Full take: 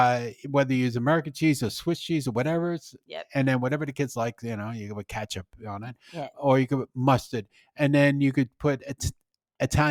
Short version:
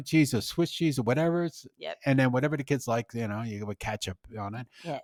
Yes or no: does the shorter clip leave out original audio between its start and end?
no